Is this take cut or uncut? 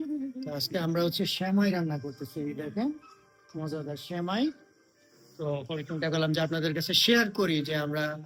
uncut